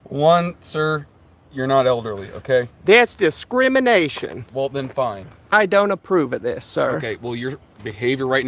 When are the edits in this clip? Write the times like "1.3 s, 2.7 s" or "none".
5.5 s